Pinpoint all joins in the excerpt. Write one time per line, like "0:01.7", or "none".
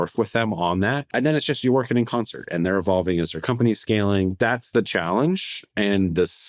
0:01.1
0:04.3